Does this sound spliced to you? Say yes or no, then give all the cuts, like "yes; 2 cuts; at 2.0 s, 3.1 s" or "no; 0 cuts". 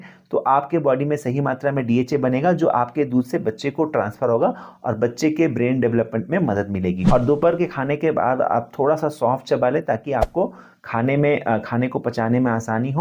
yes; 1 cut; at 7.0 s